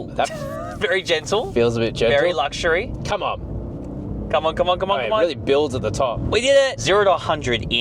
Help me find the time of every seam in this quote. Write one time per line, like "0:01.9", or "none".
0:06.6